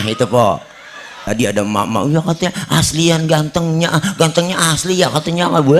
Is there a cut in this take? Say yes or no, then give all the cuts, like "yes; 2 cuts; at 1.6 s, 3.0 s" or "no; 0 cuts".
yes; 1 cut; at 1.2 s